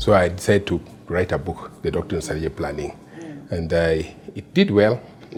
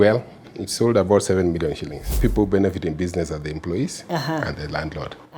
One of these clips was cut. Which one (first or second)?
second